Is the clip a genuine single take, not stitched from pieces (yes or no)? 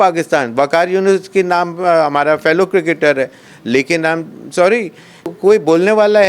no